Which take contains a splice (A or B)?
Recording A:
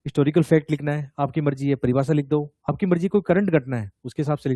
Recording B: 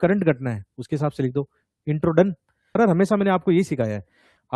B